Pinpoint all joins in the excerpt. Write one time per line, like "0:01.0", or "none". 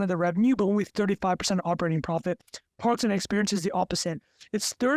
none